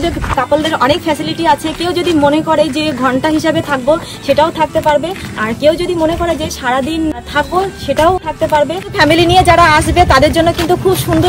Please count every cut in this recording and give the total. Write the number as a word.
zero